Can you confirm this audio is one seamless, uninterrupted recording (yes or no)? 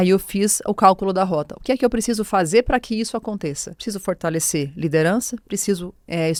yes